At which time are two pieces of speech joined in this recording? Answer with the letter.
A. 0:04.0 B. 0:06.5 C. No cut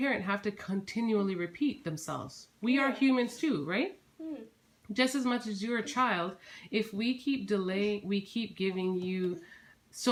C